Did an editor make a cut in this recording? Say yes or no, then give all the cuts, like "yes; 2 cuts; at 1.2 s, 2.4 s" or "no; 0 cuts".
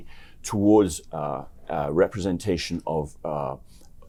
no; 0 cuts